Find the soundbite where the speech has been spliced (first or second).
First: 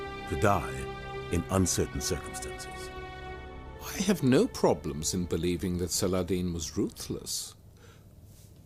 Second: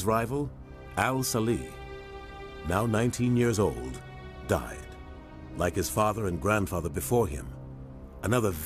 first